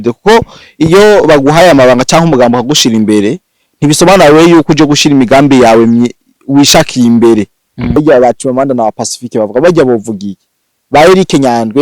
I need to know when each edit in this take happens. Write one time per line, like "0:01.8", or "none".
0:08.0